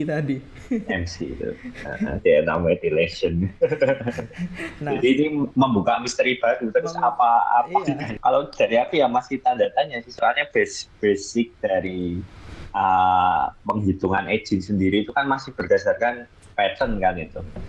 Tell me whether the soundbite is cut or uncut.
cut